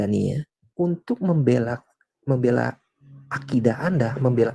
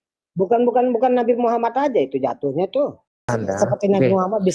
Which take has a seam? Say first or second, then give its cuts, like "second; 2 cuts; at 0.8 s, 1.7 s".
second; 1 cut; at 3.4 s